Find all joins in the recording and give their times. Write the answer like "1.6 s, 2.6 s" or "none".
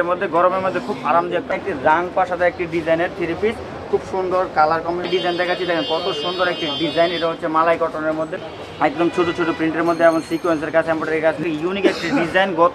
1.5 s, 5.1 s, 8.5 s, 11.4 s